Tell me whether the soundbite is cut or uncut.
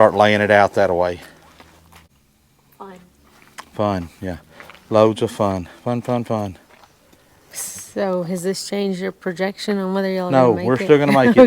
cut